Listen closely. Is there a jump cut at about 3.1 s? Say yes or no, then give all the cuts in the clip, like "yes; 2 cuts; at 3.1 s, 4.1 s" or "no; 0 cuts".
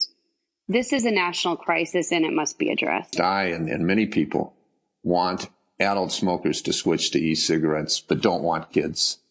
yes; 1 cut; at 3.1 s